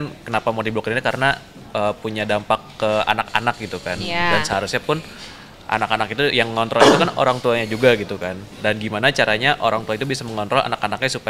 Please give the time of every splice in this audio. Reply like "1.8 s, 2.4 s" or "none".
none